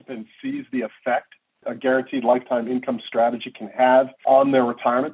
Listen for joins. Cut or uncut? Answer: cut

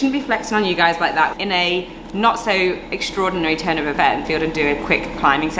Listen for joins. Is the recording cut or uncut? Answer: cut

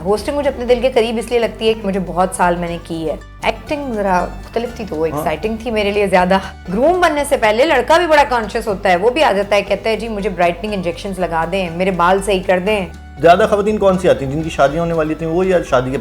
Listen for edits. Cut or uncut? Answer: cut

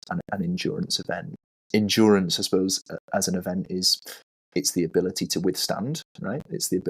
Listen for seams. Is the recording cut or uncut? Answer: cut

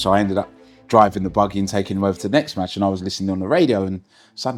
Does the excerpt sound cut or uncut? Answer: uncut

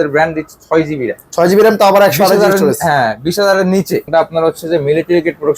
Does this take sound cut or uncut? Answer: cut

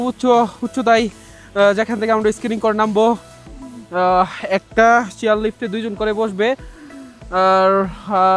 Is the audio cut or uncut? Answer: uncut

